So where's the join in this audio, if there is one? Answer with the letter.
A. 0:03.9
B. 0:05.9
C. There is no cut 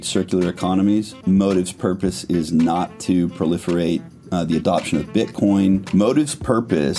B